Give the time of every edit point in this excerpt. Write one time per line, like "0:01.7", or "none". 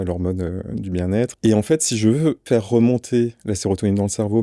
0:01.3
0:02.4